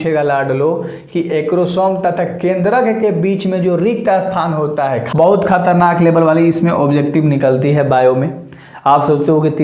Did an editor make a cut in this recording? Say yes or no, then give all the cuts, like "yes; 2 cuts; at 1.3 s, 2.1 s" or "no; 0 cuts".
yes; 1 cut; at 5.0 s